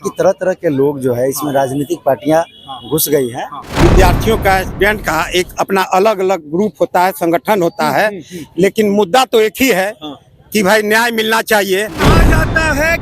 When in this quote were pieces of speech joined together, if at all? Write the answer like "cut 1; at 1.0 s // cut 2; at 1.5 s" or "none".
cut 1; at 3.6 s // cut 2; at 12.0 s